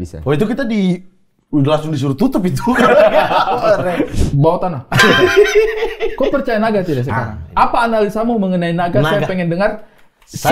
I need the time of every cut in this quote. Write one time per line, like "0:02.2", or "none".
0:04.1